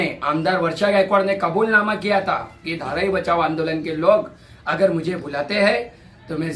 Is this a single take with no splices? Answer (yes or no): yes